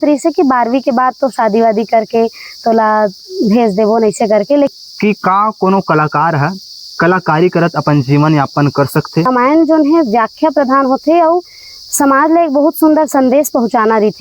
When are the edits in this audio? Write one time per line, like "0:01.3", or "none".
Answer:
0:04.7
0:09.3